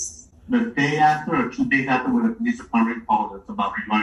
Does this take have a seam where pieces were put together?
no; 0 cuts

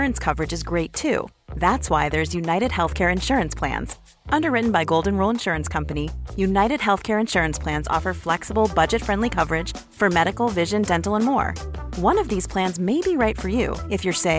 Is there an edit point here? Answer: no; 0 cuts

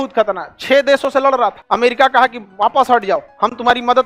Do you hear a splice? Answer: yes; 2 cuts; at 1.6 s, 2.4 s

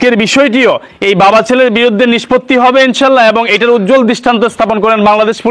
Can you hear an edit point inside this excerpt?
no; 0 cuts

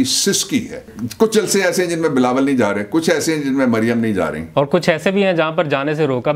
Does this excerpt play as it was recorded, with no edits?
no; 2 cuts; at 1.0 s, 4.4 s

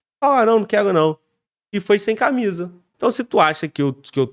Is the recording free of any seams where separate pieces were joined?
no; 1 cut; at 2.9 s

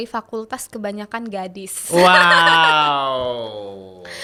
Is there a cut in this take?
no; 0 cuts

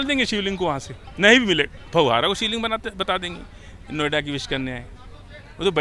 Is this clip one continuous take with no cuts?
yes; 0 cuts

